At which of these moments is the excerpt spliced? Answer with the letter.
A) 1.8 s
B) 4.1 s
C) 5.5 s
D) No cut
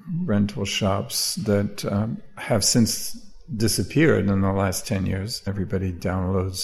C